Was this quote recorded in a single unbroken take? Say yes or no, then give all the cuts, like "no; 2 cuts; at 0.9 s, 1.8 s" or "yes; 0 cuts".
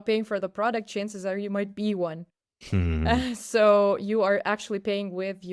yes; 0 cuts